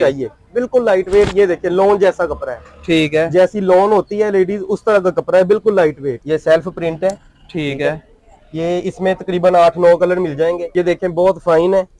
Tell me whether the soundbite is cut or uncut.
cut